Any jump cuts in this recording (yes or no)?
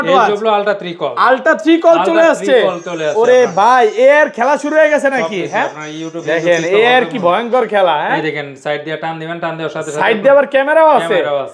no